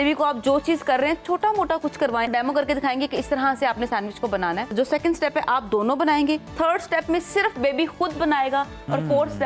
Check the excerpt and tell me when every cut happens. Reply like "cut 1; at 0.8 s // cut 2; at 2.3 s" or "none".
cut 1; at 2.3 s // cut 2; at 4.7 s // cut 3; at 6.5 s